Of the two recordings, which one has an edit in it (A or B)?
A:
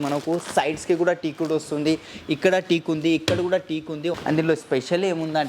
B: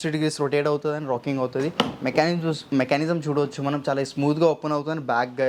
A